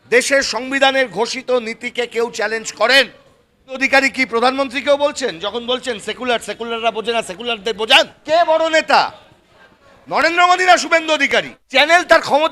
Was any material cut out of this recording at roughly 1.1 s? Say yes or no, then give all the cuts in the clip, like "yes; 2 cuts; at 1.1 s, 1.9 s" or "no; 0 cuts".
no; 3 cuts; at 3.8 s, 8.2 s, 11.6 s